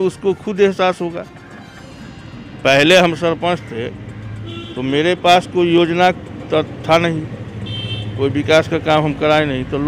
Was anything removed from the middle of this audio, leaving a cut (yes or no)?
no